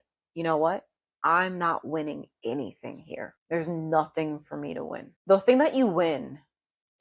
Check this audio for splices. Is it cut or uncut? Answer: cut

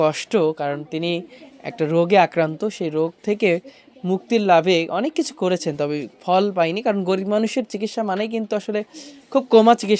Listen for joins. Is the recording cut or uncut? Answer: uncut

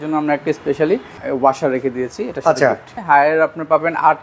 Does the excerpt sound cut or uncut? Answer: cut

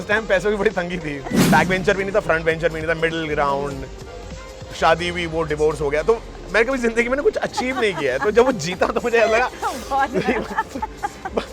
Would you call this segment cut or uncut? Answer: cut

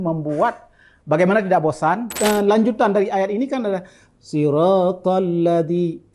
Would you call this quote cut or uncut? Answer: cut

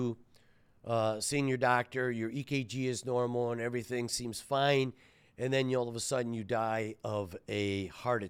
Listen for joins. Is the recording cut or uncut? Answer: uncut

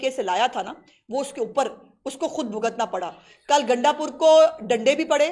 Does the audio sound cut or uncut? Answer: uncut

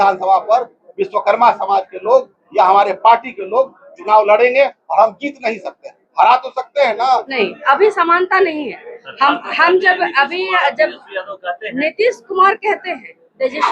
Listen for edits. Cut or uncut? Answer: cut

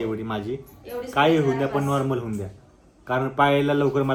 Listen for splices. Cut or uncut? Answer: uncut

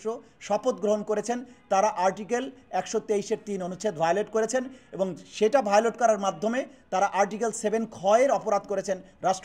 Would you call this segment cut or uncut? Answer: uncut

